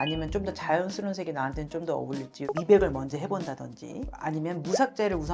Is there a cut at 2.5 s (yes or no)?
yes